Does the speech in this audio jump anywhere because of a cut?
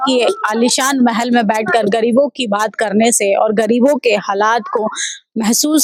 no; 0 cuts

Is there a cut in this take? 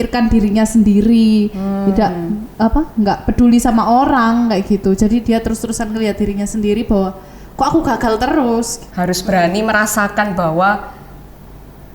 yes; 1 cut; at 8.8 s

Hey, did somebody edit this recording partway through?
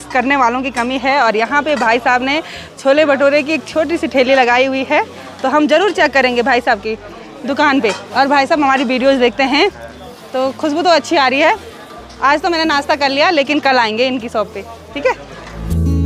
no; 0 cuts

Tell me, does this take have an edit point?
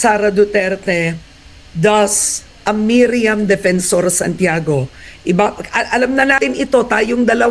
no; 0 cuts

